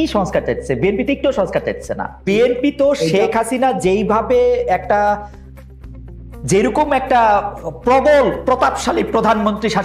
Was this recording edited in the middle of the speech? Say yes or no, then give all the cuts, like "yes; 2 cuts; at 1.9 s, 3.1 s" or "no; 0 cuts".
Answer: yes; 1 cut; at 2.2 s